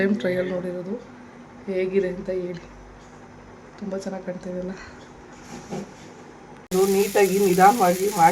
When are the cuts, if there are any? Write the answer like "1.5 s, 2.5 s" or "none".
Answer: 6.7 s